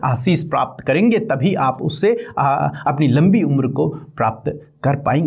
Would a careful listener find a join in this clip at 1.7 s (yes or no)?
no